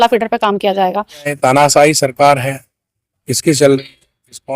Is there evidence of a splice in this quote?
yes; 1 cut; at 1.3 s

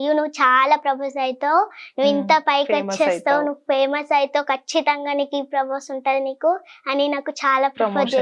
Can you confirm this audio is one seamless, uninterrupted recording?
yes; 0 cuts

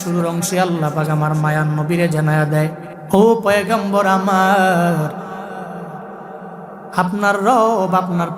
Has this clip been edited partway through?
yes; 1 cut; at 2.9 s

